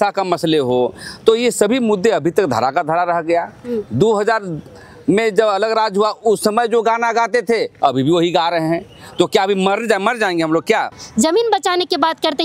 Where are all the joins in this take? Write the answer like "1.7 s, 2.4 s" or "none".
11.0 s